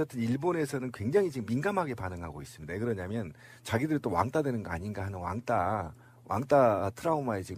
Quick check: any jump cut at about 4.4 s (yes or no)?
no